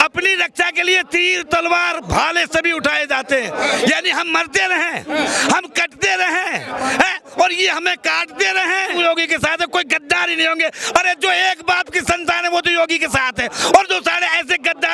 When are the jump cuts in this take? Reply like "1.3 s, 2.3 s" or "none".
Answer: 8.9 s